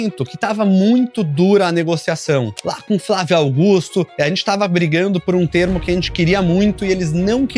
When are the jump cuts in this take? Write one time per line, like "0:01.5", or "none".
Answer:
none